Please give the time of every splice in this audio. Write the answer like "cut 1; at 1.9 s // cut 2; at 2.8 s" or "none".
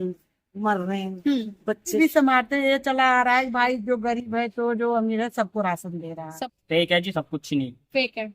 cut 1; at 2.0 s // cut 2; at 6.3 s